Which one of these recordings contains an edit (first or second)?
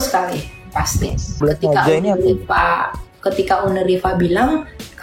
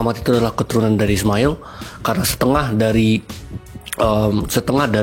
first